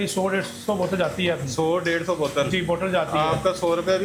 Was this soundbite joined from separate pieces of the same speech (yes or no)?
no